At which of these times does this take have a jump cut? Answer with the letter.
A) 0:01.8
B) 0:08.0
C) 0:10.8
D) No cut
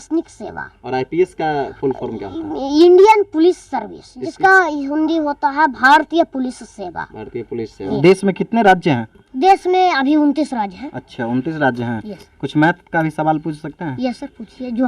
B